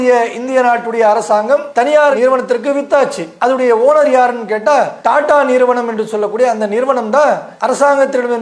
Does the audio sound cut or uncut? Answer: cut